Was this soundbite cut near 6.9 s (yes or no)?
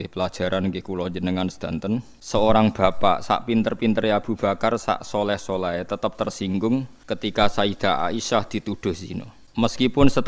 yes